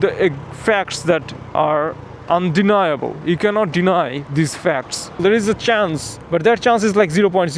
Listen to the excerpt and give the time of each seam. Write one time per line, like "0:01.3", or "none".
0:01.4
0:05.2
0:06.1